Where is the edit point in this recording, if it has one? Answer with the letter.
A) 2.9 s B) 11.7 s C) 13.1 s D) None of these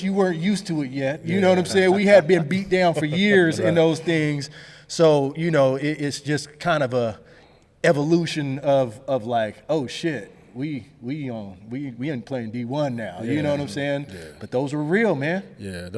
D